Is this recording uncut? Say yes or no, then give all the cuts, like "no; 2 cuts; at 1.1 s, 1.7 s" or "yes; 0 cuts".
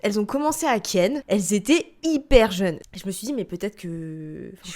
no; 2 cuts; at 1.2 s, 2.8 s